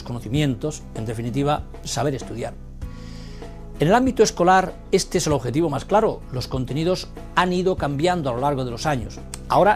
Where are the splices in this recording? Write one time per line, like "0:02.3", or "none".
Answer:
0:01.2